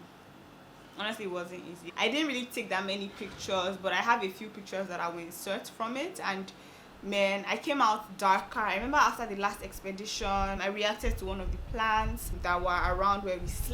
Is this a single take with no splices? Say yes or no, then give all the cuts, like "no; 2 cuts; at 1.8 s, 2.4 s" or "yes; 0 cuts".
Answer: yes; 0 cuts